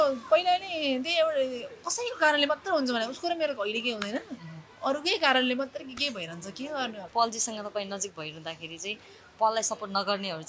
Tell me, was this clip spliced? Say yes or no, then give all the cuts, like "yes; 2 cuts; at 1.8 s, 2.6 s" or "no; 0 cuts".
yes; 1 cut; at 7.1 s